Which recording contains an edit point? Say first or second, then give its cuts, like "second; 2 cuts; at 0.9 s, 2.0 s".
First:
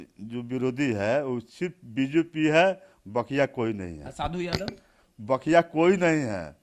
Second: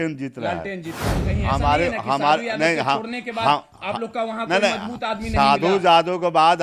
second; 1 cut; at 1.2 s